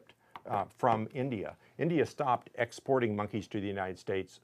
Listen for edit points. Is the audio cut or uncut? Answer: cut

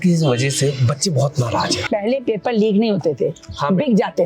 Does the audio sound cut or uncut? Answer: cut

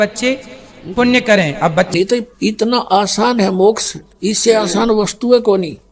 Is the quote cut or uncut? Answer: cut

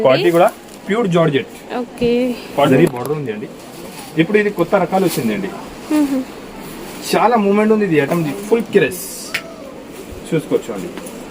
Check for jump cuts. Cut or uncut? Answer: cut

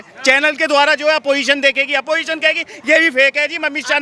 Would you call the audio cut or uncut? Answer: uncut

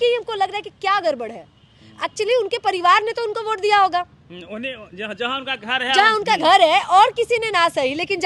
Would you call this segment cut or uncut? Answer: uncut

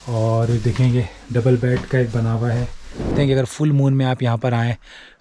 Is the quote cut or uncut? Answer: cut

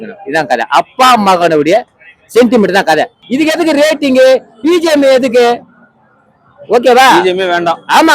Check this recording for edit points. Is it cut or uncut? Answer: cut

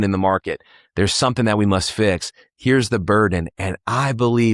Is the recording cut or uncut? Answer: uncut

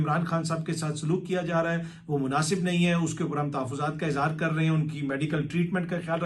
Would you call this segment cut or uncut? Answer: uncut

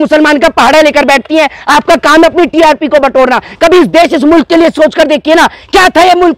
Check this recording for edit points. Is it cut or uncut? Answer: uncut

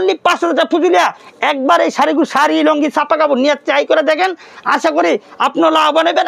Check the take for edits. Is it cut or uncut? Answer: uncut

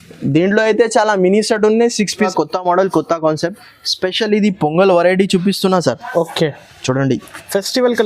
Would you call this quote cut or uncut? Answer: cut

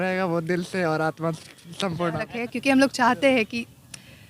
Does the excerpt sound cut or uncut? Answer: cut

